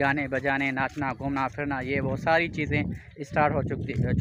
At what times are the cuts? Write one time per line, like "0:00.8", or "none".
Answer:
none